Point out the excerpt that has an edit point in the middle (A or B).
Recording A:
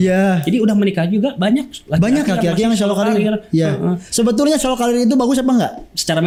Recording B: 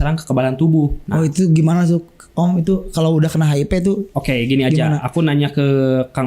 B